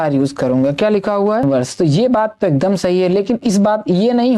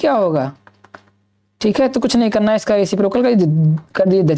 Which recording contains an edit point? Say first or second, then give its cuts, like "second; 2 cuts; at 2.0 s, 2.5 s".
first; 1 cut; at 1.4 s